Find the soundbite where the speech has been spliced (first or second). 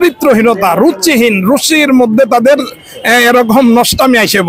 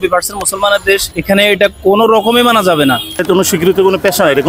second